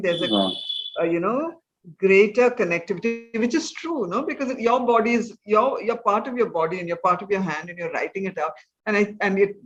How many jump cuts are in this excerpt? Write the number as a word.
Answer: zero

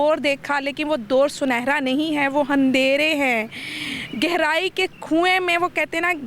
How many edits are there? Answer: zero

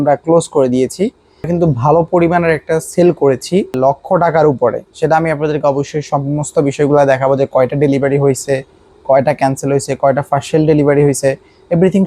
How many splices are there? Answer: two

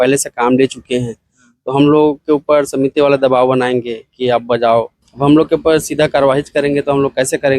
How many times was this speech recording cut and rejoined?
one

